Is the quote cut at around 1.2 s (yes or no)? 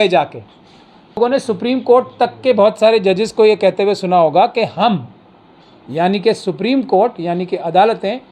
yes